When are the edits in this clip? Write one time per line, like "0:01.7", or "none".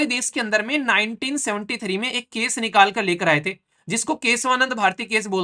none